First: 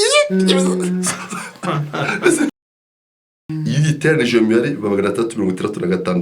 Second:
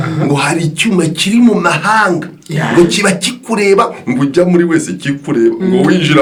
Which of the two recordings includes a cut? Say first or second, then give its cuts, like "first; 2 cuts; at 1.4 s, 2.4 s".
first; 1 cut; at 3.0 s